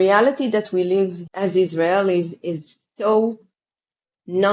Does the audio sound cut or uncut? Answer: cut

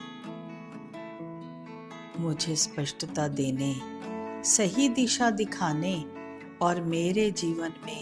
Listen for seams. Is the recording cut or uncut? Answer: uncut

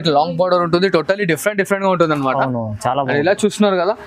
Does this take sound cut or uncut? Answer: uncut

